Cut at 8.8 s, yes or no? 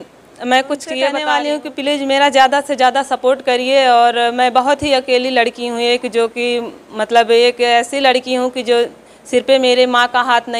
no